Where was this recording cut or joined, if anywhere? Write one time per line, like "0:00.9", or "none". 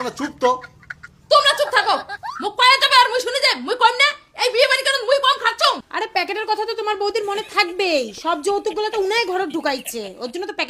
0:05.9